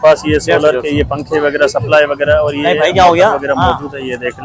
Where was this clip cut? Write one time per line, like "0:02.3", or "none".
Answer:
none